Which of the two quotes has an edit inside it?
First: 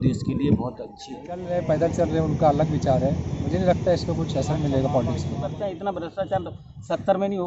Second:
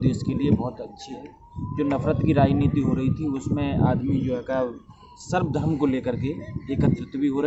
first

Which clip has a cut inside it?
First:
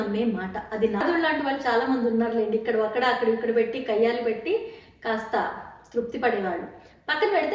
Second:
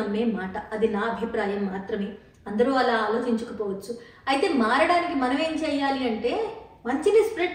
first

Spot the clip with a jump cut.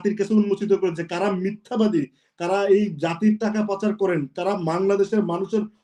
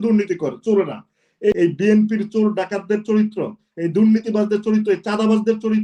second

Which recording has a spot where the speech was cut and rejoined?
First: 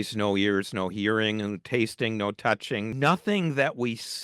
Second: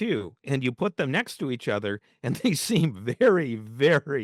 first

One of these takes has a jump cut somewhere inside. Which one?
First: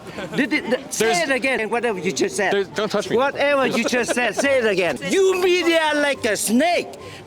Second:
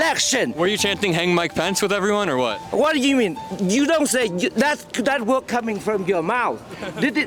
first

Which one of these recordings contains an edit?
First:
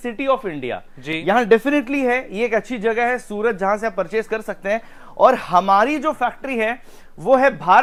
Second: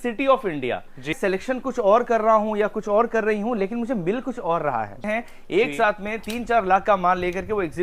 second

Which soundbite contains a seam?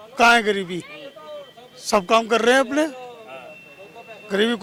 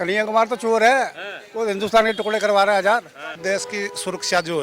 second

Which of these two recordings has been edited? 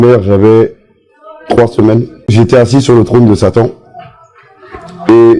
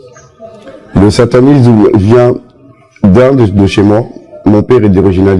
first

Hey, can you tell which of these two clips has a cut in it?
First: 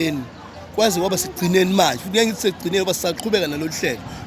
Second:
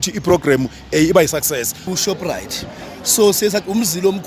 second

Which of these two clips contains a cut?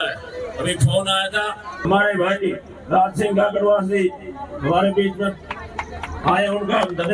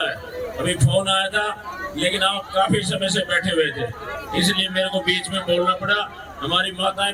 first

